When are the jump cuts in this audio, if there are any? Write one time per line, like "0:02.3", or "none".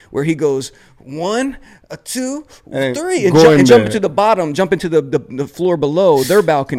none